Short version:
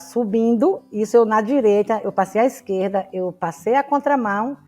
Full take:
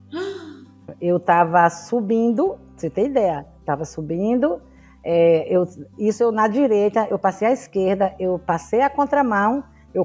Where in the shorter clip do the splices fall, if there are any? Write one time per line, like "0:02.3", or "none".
0:00.9